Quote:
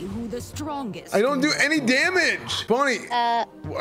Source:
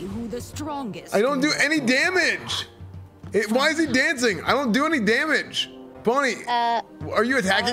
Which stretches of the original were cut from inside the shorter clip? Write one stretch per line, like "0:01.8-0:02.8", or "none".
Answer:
0:02.5-0:05.8